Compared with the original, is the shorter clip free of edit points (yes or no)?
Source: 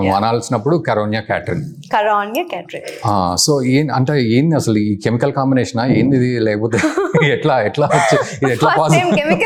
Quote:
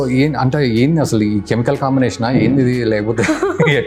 yes